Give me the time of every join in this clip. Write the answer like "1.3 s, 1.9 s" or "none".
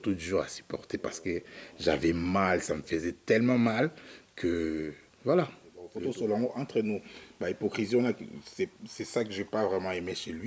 5.9 s